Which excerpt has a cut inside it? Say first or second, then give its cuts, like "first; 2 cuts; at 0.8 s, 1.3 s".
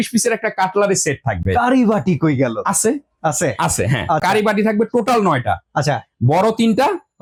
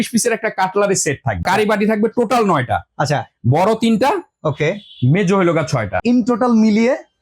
second; 2 cuts; at 1.4 s, 6.0 s